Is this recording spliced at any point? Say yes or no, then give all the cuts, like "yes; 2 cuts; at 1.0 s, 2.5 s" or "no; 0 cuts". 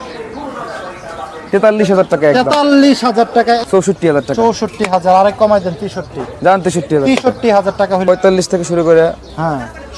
yes; 2 cuts; at 3.6 s, 8.1 s